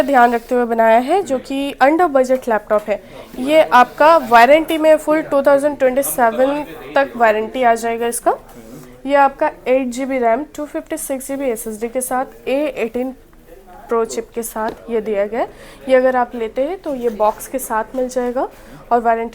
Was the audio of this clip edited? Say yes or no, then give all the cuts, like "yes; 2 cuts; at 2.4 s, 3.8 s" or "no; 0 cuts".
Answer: no; 0 cuts